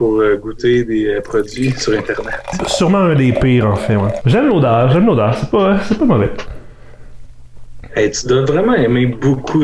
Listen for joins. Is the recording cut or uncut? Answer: cut